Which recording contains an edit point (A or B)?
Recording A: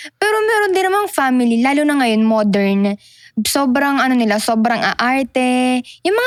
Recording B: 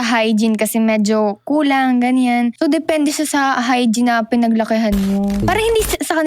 B